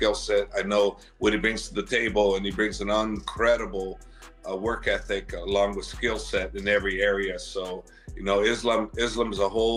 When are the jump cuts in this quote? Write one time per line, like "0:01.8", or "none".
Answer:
none